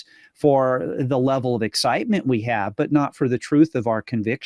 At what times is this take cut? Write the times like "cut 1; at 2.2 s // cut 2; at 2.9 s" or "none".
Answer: none